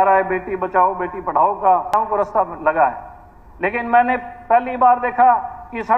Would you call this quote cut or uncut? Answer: cut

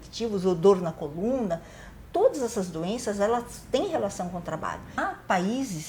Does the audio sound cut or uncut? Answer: cut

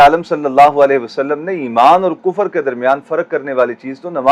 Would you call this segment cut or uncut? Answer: uncut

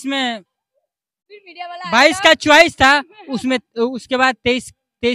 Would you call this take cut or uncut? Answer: uncut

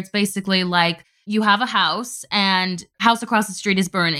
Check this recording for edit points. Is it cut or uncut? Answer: cut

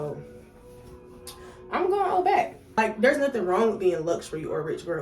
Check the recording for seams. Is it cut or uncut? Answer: cut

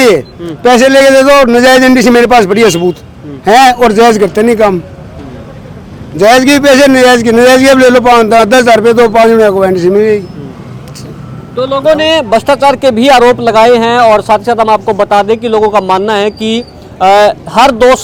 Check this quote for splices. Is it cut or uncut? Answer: uncut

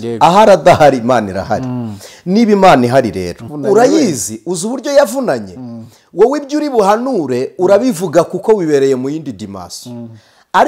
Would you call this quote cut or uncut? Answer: cut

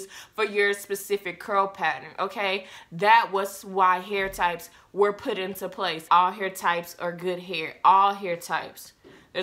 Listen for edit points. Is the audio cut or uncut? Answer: cut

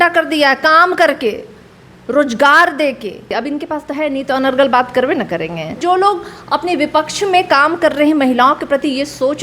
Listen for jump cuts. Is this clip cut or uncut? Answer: cut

